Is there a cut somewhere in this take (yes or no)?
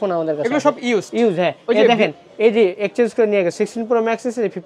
no